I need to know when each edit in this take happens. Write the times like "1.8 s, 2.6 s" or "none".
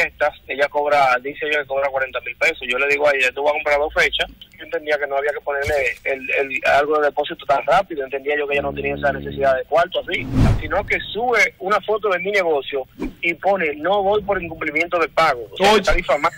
4.5 s, 10.6 s